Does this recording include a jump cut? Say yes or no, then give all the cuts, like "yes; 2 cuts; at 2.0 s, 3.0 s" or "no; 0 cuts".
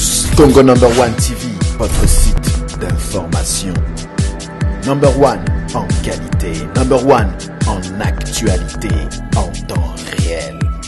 no; 0 cuts